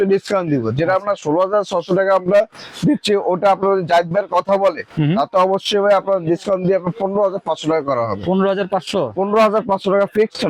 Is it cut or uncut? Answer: uncut